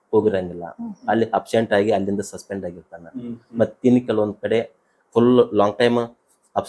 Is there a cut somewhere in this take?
no; 0 cuts

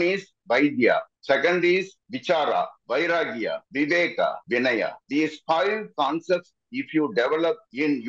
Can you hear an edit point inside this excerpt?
no; 0 cuts

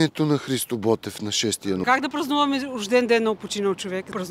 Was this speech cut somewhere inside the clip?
yes; 1 cut; at 1.9 s

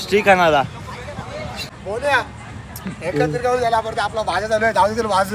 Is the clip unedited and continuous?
no; 1 cut; at 1.6 s

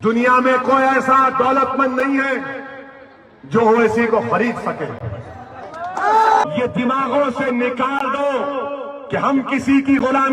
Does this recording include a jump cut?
yes; 1 cut; at 6.4 s

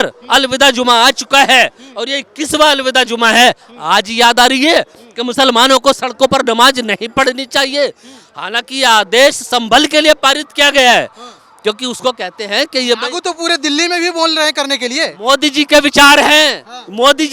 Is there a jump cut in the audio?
no; 0 cuts

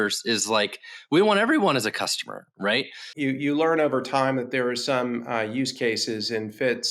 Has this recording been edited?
yes; 1 cut; at 3.1 s

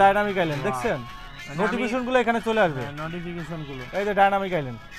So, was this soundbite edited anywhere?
no; 0 cuts

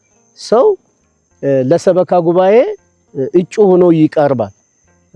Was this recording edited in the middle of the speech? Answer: no; 0 cuts

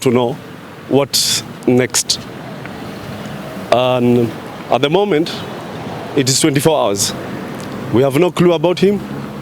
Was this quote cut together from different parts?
no; 0 cuts

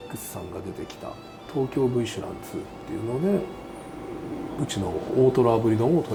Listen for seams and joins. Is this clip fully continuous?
yes; 0 cuts

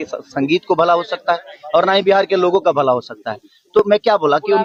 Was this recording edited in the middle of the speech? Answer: no; 0 cuts

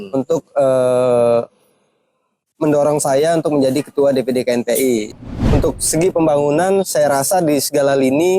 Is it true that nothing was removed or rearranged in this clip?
no; 1 cut; at 5.1 s

